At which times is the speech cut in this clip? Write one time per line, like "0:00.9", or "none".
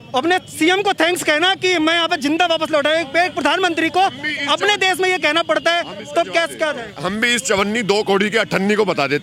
none